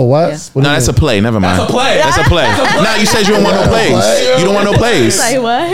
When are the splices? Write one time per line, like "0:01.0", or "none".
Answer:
none